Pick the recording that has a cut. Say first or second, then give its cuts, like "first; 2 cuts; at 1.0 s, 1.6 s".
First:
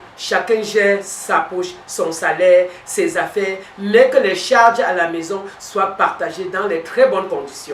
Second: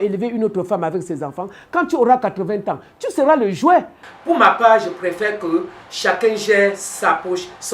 second; 1 cut; at 4.0 s